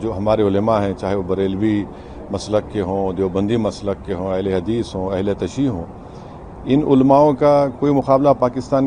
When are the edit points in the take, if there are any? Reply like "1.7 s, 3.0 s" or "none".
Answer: none

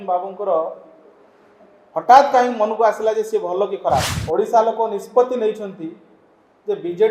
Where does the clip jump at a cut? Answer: 4.2 s

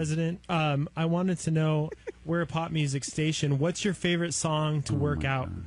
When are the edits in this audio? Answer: 1.1 s

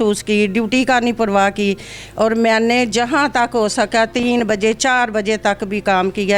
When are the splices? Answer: none

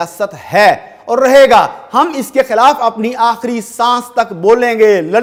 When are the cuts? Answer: none

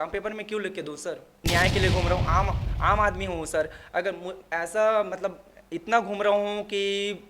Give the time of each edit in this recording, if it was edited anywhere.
1.3 s

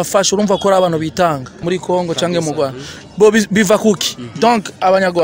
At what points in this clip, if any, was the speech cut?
1.6 s

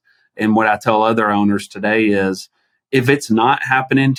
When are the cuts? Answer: none

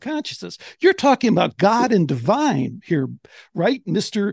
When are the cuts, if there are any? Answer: none

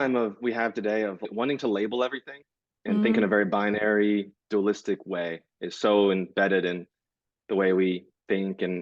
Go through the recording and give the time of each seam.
1.3 s

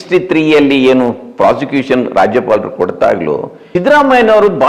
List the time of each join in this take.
3.5 s

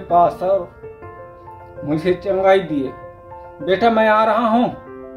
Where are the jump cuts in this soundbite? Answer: none

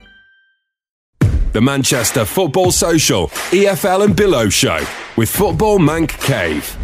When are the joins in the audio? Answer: 1.0 s

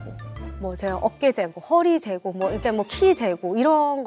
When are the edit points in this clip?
none

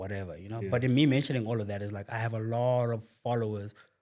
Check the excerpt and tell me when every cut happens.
none

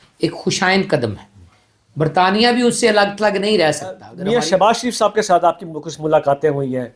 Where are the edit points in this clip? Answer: 4.1 s

